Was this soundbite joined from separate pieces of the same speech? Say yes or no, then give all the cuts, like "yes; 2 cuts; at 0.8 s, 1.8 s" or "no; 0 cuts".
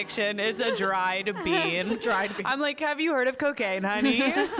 no; 0 cuts